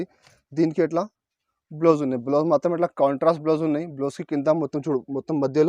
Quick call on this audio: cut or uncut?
uncut